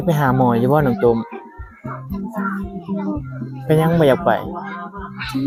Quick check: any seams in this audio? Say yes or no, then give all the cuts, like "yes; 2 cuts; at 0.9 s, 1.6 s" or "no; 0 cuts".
no; 0 cuts